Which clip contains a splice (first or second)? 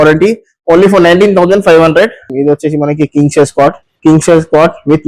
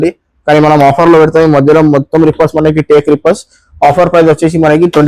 first